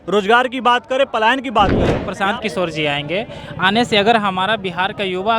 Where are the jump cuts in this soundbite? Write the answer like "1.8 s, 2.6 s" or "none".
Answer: 2.0 s